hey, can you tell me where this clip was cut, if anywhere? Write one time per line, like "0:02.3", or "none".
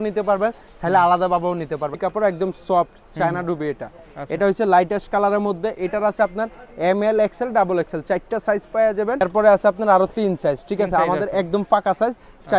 0:02.0
0:09.2